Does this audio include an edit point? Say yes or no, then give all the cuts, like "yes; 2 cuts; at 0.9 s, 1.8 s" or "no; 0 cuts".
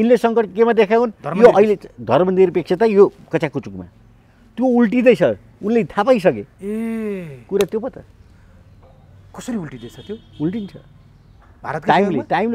no; 0 cuts